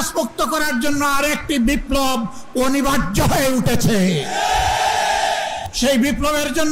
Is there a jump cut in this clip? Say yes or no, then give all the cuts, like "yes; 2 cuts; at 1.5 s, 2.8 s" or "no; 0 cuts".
yes; 1 cut; at 5.6 s